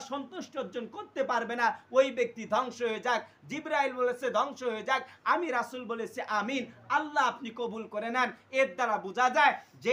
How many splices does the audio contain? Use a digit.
0